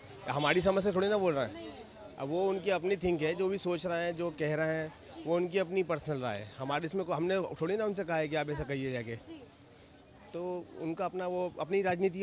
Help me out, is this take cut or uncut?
uncut